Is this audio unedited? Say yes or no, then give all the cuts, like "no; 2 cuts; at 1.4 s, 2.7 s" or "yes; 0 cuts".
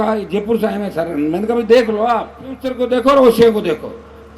no; 1 cut; at 2.7 s